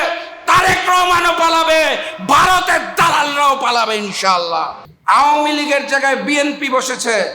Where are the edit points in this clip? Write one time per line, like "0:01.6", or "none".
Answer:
0:04.8